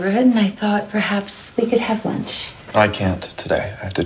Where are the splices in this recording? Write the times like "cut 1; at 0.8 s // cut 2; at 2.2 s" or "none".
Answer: none